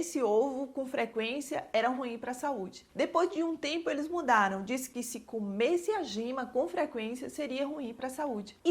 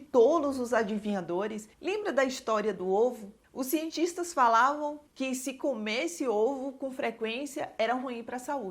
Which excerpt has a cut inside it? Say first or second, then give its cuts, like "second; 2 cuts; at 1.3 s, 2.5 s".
second; 1 cut; at 1.7 s